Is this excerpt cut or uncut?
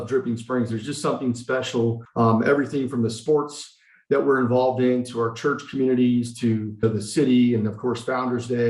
cut